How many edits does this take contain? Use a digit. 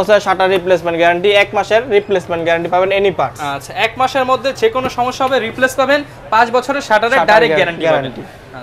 0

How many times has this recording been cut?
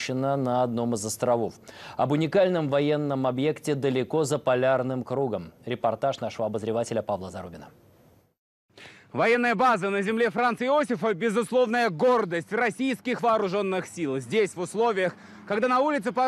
1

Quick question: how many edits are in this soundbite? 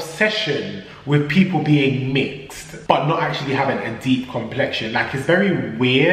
1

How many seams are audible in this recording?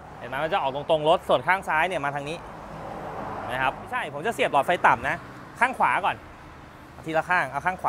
1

